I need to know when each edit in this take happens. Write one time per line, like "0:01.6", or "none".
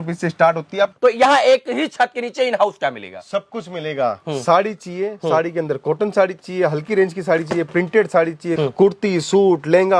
0:00.9
0:08.6